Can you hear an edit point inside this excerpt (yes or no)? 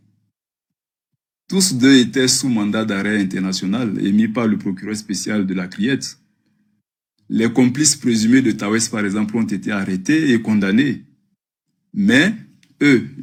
no